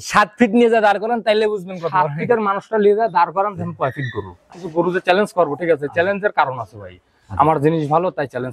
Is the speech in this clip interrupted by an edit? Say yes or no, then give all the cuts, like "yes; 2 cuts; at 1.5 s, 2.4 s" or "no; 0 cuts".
yes; 1 cut; at 4.4 s